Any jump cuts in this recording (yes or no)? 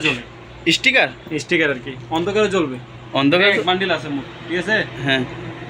no